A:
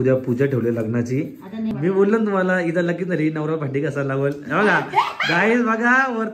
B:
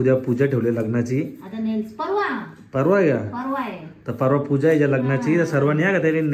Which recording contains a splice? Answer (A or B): A